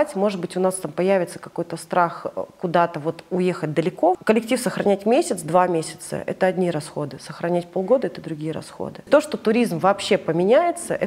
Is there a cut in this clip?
yes; 2 cuts; at 4.2 s, 9.1 s

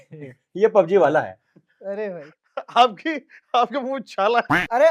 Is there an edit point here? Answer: no; 0 cuts

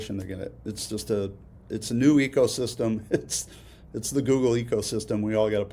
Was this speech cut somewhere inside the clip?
no; 0 cuts

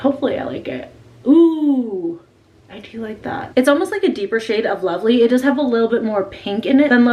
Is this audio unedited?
yes; 0 cuts

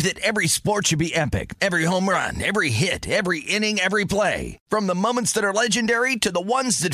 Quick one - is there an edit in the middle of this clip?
no; 0 cuts

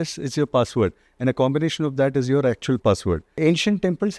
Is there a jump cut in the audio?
yes; 1 cut; at 3.3 s

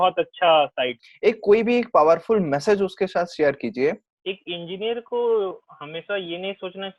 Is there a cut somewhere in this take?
yes; 2 cuts; at 1.0 s, 4.1 s

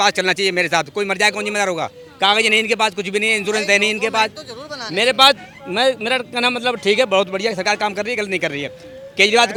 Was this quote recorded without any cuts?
yes; 0 cuts

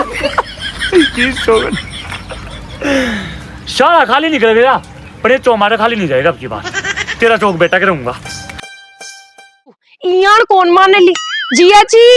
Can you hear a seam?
yes; 1 cut; at 9.9 s

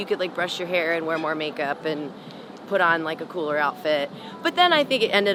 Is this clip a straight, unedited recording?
yes; 0 cuts

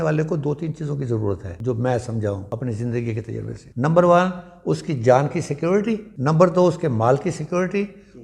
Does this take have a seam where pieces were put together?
yes; 4 cuts; at 1.5 s, 2.4 s, 3.6 s, 6.1 s

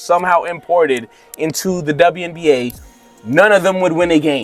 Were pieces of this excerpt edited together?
no; 0 cuts

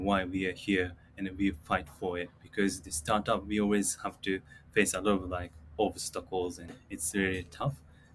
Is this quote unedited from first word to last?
no; 1 cut; at 6.7 s

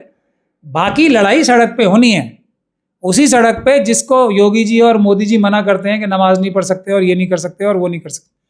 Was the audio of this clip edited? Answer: no; 0 cuts

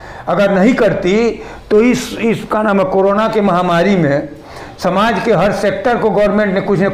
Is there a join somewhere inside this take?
no; 0 cuts

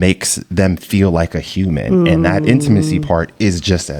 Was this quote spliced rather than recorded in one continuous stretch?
no; 0 cuts

